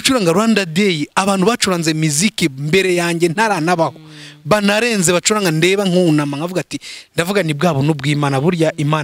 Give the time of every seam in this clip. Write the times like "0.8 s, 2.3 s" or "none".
none